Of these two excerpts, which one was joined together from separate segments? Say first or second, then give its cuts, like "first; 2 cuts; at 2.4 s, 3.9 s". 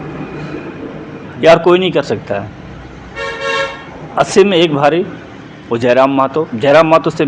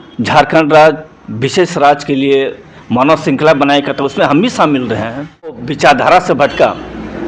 second; 1 cut; at 5.7 s